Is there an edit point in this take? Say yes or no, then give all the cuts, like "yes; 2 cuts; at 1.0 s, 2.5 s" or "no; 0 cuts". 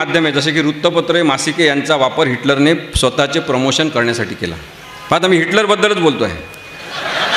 no; 0 cuts